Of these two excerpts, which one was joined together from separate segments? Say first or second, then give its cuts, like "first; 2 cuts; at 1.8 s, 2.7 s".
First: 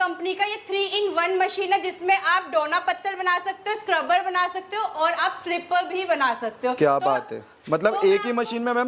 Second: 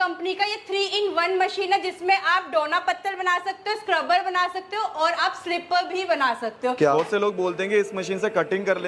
second; 1 cut; at 6.9 s